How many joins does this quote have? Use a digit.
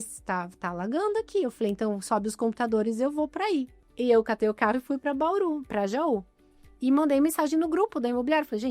1